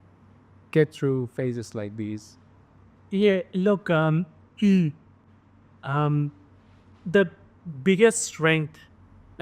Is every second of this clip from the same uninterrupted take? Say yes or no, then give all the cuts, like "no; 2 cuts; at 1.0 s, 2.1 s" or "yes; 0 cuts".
yes; 0 cuts